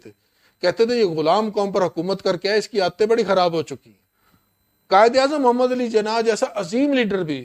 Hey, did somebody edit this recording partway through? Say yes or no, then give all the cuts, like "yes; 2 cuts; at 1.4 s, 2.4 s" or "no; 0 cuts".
no; 0 cuts